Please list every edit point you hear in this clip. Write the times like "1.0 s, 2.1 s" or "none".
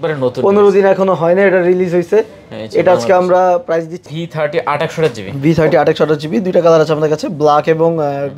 4.0 s